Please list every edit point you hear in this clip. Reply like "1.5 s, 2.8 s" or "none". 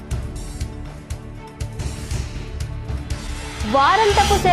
1.5 s